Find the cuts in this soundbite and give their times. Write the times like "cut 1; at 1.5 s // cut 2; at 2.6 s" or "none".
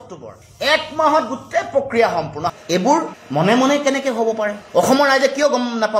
cut 1; at 2.5 s